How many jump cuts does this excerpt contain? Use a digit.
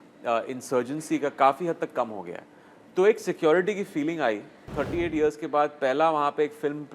1